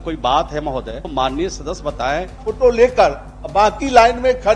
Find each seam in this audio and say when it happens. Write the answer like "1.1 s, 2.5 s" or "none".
1.0 s, 2.4 s